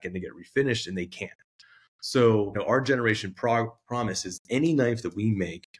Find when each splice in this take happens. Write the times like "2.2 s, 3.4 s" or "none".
2.6 s